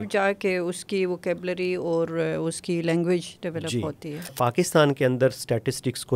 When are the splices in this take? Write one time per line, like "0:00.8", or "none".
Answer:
0:04.3